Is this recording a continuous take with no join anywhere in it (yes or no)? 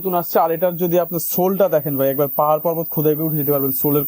yes